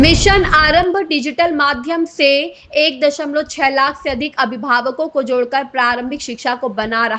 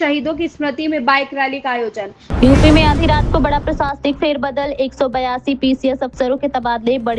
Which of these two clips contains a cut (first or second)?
second